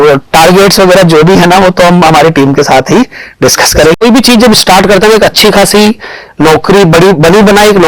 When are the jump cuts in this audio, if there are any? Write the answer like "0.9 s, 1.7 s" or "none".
4.0 s